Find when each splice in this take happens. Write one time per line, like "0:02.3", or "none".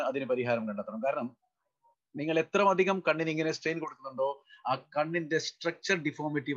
none